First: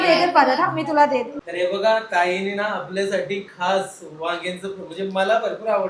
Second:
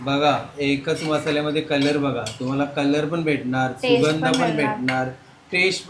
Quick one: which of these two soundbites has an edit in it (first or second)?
first